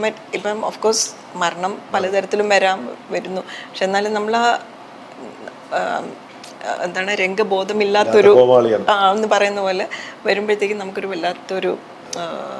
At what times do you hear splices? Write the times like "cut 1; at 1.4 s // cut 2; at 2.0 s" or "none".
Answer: none

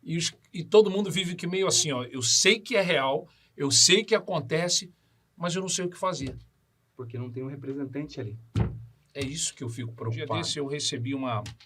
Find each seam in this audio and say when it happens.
cut 1; at 10.5 s

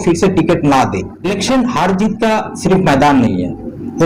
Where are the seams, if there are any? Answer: cut 1; at 1.1 s

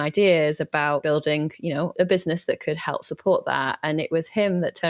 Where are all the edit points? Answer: cut 1; at 1.0 s // cut 2; at 1.9 s

